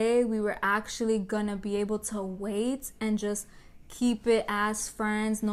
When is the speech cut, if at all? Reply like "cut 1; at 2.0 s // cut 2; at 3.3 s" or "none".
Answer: none